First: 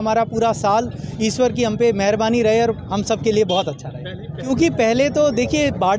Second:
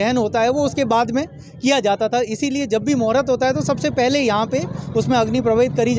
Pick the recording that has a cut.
first; 1 cut; at 4.5 s

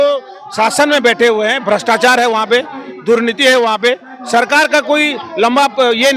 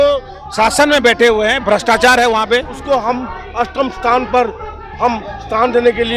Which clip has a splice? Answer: second; 1 cut; at 2.7 s

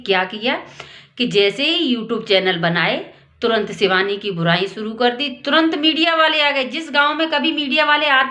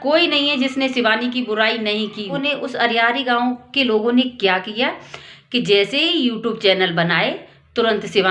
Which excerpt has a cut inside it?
second; 1 cut; at 2.3 s

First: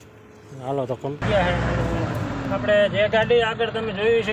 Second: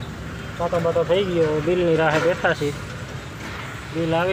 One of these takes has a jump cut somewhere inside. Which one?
first; 1 cut; at 1.2 s

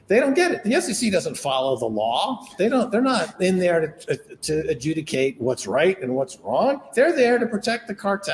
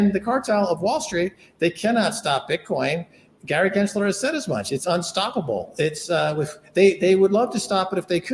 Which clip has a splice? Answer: second; 1 cut; at 3.1 s

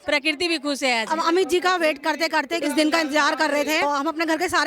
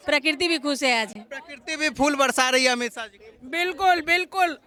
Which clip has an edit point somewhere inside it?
first; 3 cuts; at 1.2 s, 2.5 s, 3.8 s

